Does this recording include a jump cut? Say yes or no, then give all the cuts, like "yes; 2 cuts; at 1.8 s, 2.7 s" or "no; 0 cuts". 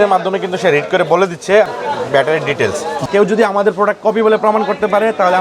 yes; 2 cuts; at 1.7 s, 3.0 s